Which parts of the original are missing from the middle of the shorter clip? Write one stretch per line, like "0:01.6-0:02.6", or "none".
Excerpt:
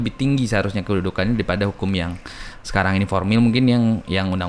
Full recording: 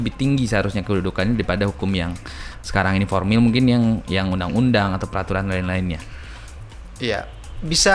none